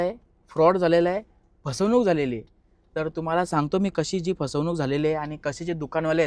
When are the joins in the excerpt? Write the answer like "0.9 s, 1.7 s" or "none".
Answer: none